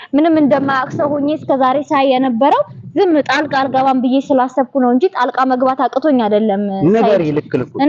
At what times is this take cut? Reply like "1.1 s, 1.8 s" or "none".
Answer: none